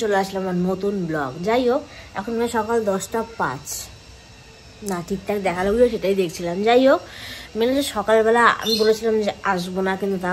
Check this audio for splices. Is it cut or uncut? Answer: uncut